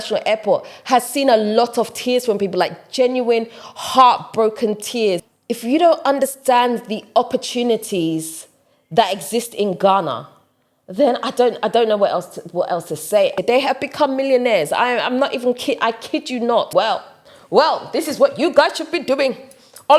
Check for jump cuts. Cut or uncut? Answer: cut